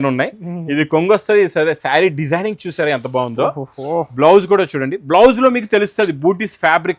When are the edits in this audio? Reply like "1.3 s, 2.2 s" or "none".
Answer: none